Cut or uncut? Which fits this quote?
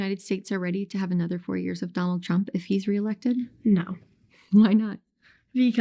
uncut